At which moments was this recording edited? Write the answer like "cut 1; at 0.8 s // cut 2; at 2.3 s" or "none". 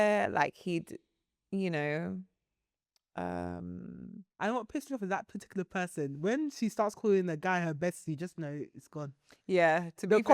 cut 1; at 4.3 s